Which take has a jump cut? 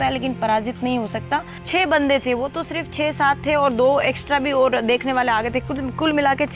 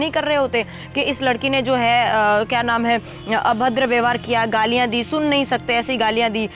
first; 1 cut; at 1.6 s

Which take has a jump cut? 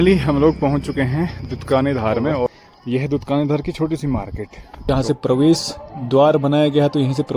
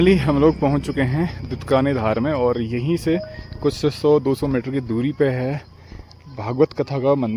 first; 2 cuts; at 2.5 s, 4.9 s

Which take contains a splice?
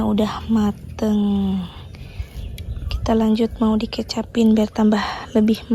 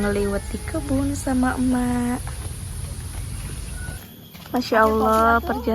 second; 1 cut; at 4.0 s

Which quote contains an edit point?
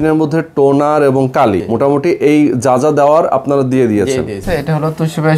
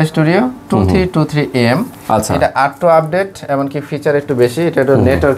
first; 2 cuts; at 1.7 s, 4.4 s

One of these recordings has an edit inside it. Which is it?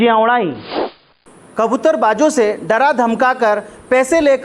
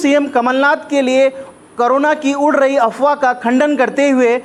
first; 1 cut; at 1.2 s

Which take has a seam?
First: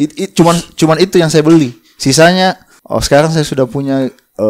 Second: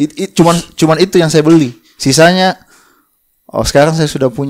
first; 1 cut; at 2.7 s

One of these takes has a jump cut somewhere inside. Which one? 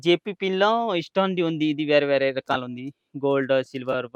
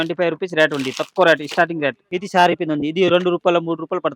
second; 1 cut; at 2.1 s

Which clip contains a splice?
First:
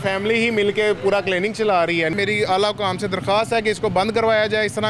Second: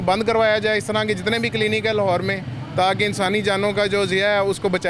first; 1 cut; at 2.1 s

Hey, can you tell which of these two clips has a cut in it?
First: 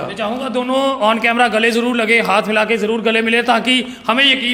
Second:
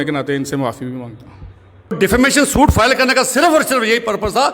second; 1 cut; at 2.0 s

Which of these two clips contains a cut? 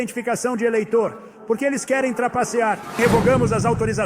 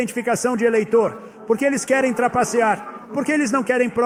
first; 1 cut; at 3.0 s

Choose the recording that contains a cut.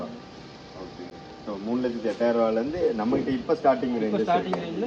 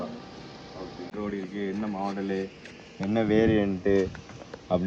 second; 1 cut; at 1.1 s

